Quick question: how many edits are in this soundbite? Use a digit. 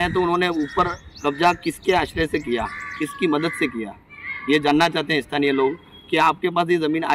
0